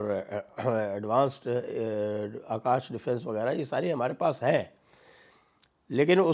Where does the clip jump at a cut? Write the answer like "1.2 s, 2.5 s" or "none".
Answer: none